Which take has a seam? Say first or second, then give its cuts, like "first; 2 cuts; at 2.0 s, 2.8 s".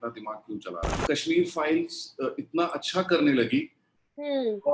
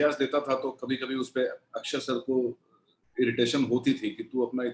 first; 1 cut; at 1.0 s